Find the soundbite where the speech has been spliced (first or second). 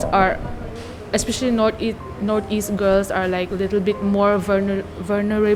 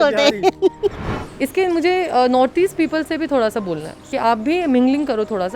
second